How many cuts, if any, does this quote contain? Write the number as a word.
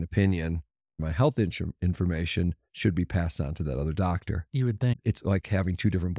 one